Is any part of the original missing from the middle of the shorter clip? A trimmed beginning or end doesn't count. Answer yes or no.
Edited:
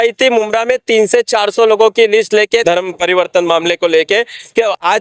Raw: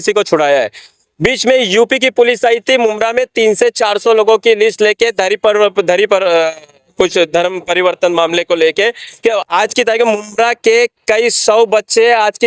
yes